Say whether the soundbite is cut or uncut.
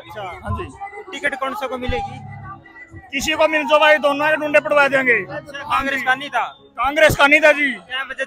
uncut